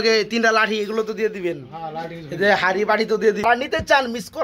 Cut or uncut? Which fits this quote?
cut